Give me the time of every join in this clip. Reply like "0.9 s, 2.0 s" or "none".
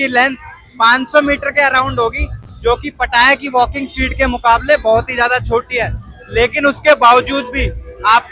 none